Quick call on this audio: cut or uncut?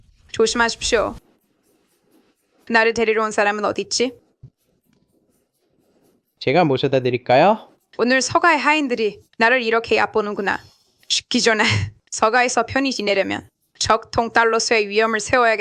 cut